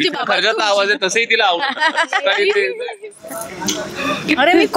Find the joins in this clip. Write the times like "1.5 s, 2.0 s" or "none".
3.5 s